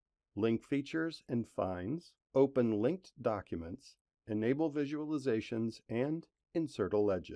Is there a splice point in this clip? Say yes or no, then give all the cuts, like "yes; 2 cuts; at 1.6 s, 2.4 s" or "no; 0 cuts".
yes; 1 cut; at 6.3 s